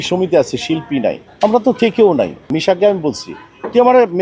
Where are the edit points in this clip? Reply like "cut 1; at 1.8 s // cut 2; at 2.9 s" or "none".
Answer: cut 1; at 1.3 s // cut 2; at 2.5 s